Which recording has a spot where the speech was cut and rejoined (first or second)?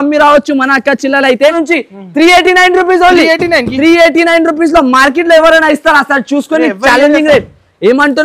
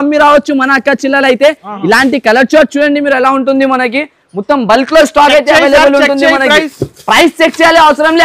first